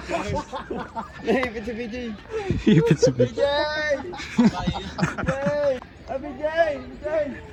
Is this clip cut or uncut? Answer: uncut